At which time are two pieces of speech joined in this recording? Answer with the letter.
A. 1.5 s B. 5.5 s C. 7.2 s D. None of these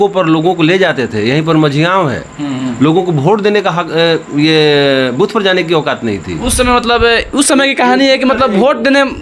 D